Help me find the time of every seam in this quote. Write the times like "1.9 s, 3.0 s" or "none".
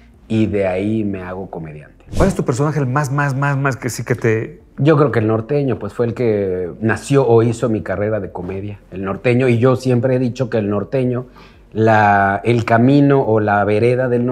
2.0 s